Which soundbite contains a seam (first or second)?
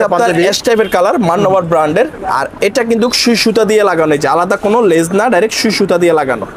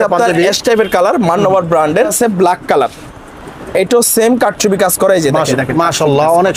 second